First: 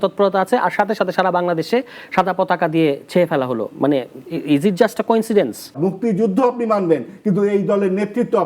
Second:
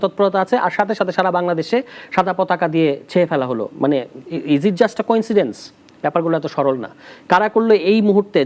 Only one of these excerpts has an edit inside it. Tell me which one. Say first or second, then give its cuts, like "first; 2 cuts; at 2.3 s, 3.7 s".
first; 1 cut; at 5.8 s